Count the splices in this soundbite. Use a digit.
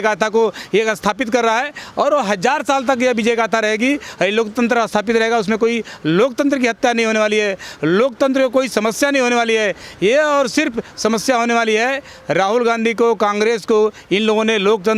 0